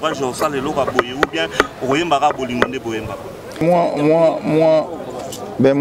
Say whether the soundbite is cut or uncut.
cut